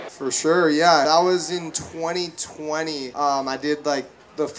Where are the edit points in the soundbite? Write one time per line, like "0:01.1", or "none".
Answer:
0:01.0
0:03.1